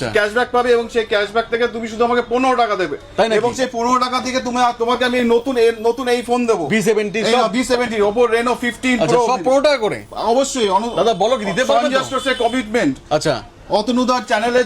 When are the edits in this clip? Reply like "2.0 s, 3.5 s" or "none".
none